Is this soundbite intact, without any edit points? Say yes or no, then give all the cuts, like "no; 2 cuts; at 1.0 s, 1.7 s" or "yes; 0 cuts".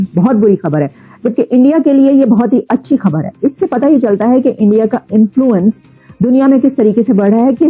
yes; 0 cuts